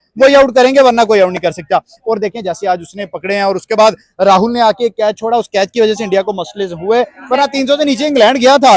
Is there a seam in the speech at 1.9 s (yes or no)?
no